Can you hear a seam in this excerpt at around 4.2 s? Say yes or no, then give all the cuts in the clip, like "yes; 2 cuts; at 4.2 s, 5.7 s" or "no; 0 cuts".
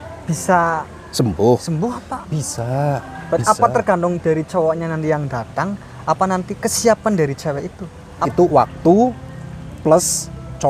no; 2 cuts; at 1.0 s, 8.1 s